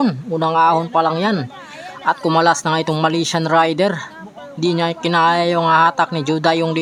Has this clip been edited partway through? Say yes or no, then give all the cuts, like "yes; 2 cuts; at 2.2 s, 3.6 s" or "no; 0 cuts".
no; 0 cuts